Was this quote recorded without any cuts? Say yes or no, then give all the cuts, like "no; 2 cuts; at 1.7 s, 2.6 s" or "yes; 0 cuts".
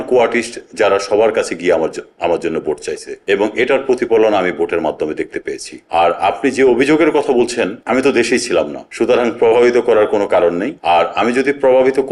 yes; 0 cuts